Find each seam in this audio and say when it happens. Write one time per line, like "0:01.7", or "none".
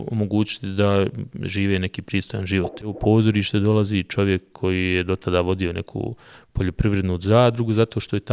0:02.9